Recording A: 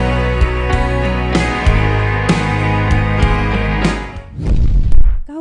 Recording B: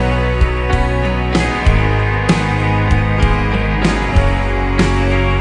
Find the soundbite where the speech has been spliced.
B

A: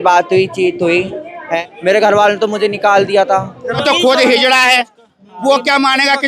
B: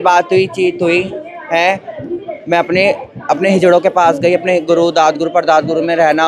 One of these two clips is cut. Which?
A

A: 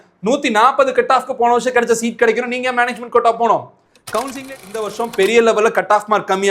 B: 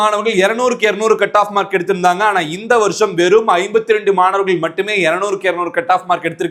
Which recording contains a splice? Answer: A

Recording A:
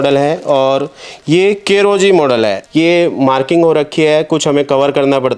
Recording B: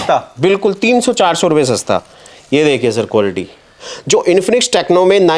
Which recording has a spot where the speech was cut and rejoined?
A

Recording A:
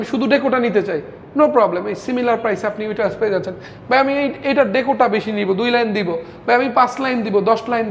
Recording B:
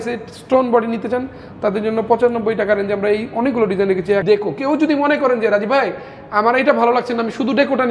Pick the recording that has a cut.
B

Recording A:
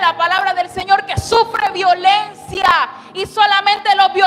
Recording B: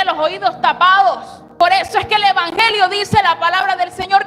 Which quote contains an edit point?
B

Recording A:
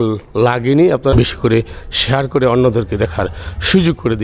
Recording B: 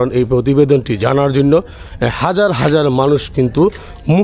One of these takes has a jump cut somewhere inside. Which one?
A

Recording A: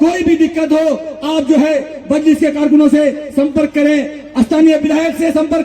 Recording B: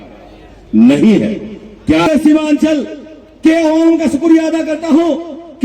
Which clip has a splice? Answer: B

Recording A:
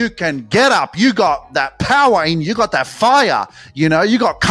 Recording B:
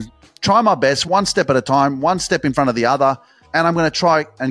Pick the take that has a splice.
B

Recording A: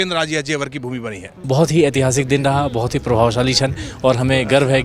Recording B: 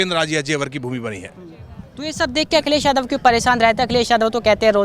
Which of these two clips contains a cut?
A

